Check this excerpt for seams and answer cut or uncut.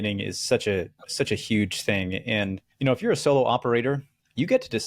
cut